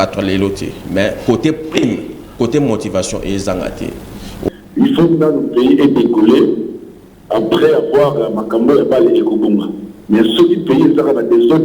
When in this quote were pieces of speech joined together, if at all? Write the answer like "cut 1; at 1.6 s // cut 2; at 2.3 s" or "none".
cut 1; at 4.4 s